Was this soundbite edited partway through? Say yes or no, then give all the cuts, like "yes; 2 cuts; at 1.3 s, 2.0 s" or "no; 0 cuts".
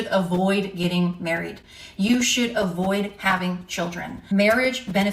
yes; 1 cut; at 4.2 s